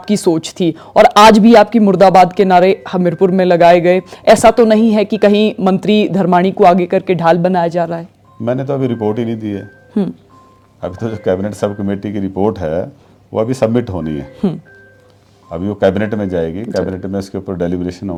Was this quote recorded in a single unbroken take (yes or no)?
yes